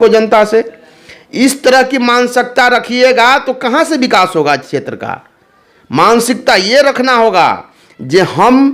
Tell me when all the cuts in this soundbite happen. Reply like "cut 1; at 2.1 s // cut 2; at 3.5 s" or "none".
none